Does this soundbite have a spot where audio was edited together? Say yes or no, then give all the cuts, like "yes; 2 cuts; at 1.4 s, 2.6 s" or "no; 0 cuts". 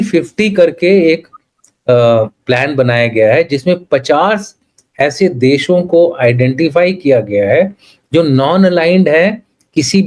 no; 0 cuts